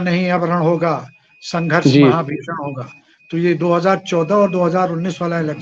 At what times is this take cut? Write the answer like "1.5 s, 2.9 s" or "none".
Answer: none